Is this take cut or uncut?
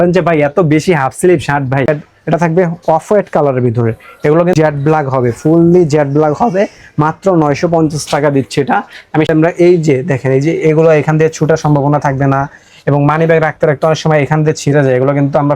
cut